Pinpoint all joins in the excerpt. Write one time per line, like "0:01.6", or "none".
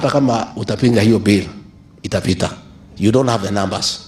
none